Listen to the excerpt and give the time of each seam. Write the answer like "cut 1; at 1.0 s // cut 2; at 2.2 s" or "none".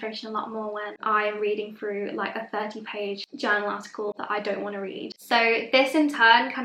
cut 1; at 3.3 s // cut 2; at 5.2 s